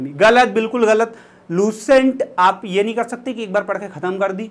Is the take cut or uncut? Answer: uncut